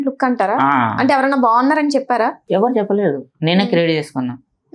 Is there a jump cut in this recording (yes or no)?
yes